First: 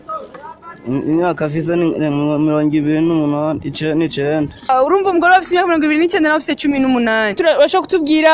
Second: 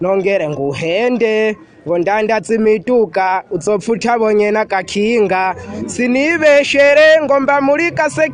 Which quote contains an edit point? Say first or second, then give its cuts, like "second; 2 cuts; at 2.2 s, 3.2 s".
first; 2 cuts; at 4.7 s, 7.4 s